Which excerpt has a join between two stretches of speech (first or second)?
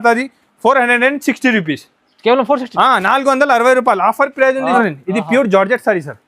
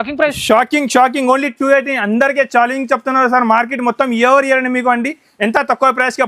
first